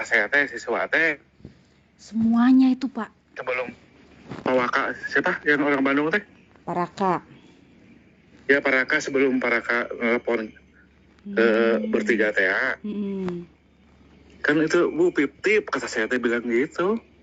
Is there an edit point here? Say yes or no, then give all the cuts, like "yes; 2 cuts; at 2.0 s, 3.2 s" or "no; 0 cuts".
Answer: no; 0 cuts